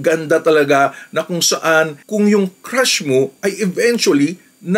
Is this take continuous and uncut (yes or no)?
yes